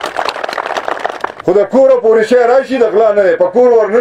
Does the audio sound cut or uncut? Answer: cut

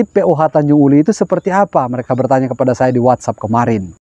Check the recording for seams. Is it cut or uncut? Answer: uncut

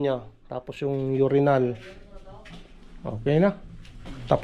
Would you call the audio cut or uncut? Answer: uncut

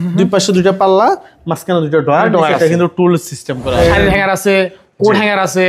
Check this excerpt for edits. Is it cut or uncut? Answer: cut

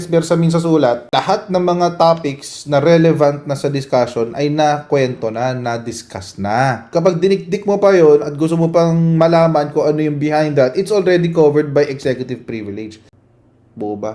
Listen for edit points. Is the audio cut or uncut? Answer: cut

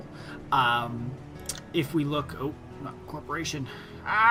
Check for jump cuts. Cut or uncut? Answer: uncut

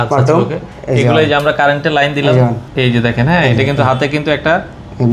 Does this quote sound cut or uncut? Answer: cut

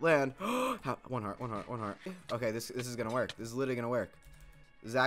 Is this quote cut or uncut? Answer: cut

